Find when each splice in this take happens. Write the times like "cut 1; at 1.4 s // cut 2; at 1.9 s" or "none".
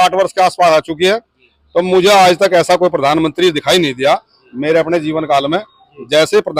none